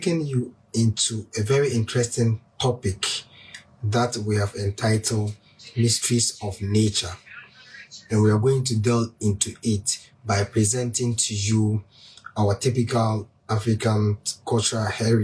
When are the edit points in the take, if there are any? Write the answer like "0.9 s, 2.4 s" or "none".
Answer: none